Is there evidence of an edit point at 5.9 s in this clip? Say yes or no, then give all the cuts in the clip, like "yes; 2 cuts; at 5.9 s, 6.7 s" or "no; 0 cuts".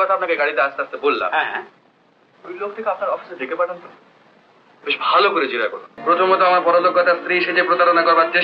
yes; 1 cut; at 5.9 s